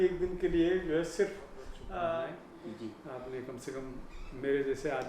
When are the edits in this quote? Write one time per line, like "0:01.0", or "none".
0:02.4